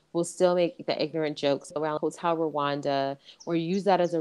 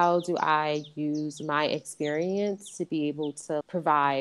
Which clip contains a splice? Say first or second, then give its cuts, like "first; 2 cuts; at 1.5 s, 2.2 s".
first; 1 cut; at 1.7 s